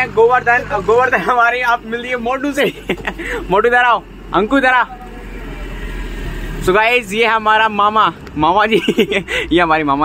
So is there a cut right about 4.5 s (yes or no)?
no